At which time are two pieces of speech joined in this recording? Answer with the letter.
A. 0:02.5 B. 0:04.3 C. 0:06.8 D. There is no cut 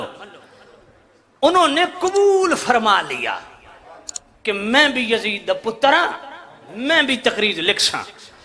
D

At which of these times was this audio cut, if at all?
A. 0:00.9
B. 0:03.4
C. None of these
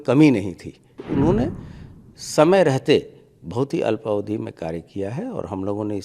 A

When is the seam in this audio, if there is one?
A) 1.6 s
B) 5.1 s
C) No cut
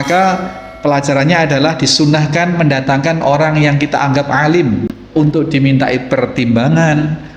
B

